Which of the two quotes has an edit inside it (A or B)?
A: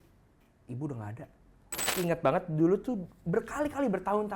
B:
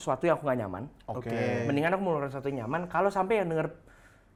A